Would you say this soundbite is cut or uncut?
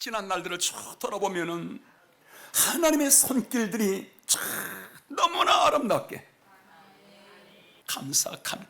uncut